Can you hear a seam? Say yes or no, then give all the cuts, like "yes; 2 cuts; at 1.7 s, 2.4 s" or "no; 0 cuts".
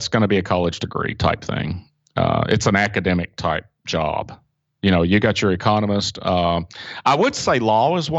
no; 0 cuts